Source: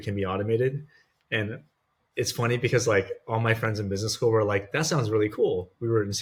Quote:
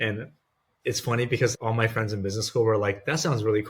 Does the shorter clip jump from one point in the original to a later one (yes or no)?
yes